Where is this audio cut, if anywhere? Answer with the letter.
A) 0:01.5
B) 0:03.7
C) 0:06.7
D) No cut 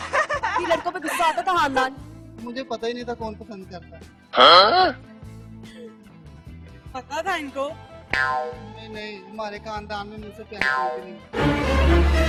D